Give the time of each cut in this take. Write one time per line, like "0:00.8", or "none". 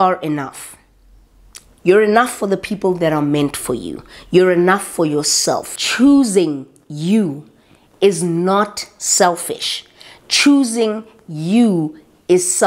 0:05.7